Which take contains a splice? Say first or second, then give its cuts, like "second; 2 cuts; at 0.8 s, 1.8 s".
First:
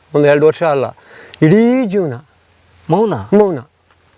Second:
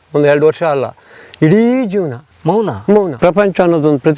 second; 2 cuts; at 2.2 s, 3.1 s